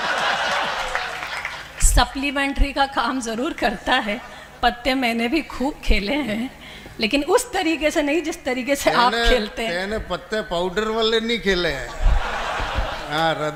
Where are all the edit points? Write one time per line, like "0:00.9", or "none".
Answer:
none